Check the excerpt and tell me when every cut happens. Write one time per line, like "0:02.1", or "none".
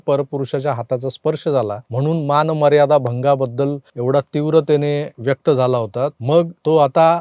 0:01.8
0:03.9
0:05.1
0:06.3

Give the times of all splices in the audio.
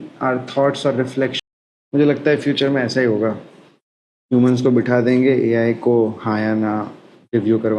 0:01.4

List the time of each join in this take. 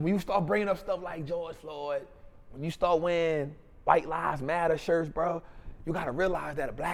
none

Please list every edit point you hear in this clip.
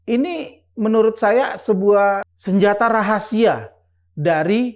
0:02.3

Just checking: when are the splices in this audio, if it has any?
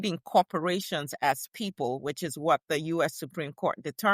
none

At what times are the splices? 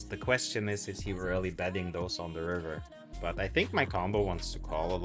0:03.0

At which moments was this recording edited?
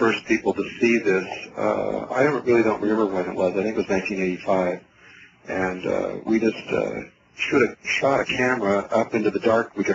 0:06.2

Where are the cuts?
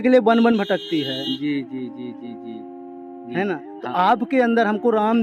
none

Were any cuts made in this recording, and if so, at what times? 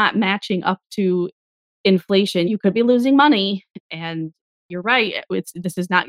0:02.5

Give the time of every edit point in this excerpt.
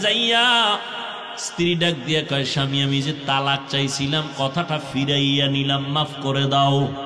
none

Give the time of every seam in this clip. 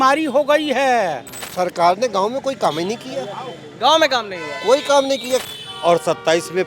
0:01.4
0:05.4

